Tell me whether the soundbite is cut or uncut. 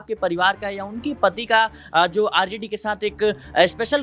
uncut